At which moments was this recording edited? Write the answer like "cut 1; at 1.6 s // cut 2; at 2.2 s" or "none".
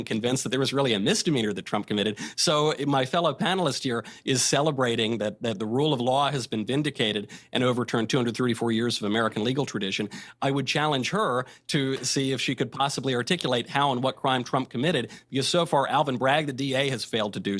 none